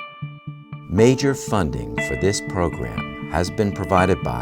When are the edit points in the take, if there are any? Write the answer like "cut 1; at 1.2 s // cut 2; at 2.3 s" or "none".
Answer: cut 1; at 0.9 s